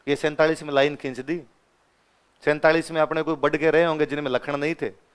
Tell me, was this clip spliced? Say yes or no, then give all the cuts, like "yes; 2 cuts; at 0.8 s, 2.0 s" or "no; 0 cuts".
no; 0 cuts